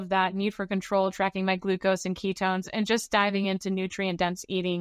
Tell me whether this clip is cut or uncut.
uncut